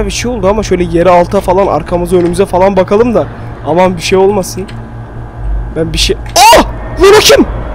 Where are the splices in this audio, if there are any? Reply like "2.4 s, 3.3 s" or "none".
none